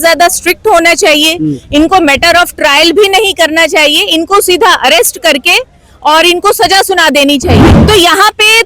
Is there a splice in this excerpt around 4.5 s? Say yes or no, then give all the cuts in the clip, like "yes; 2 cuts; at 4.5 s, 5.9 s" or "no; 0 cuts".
no; 1 cut; at 7.6 s